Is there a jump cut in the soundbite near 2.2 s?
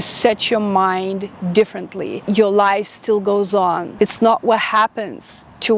yes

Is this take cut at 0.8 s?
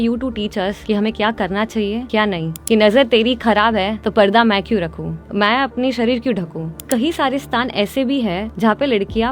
yes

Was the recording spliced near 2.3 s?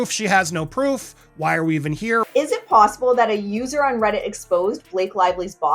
yes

